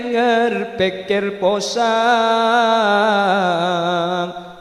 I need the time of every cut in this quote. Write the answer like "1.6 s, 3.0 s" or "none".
none